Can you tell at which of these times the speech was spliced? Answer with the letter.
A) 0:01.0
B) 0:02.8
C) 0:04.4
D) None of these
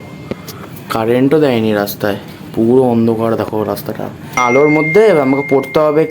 C